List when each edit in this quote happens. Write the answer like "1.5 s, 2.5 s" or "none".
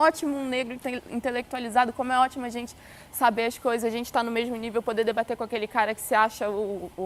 none